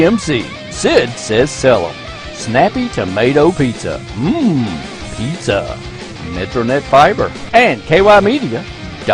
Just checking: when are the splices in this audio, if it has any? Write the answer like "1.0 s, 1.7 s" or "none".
7.4 s